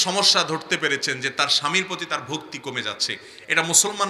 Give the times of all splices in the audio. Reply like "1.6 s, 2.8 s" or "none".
none

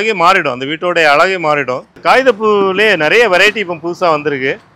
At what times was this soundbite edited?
1.9 s

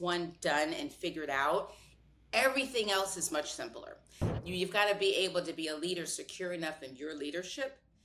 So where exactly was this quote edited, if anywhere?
4.2 s

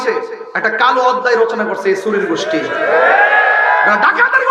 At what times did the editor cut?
none

